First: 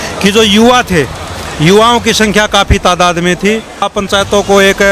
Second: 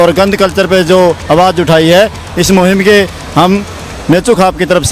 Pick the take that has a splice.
first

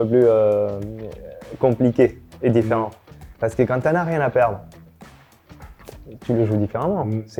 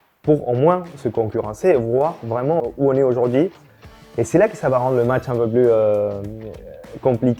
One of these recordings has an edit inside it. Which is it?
second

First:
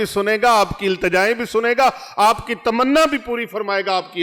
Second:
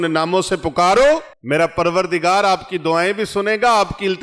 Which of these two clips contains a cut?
second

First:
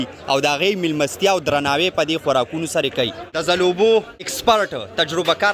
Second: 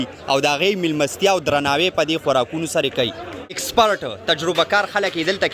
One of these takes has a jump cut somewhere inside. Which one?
second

